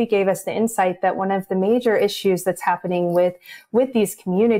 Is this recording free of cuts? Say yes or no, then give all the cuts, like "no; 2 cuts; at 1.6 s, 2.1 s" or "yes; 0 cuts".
yes; 0 cuts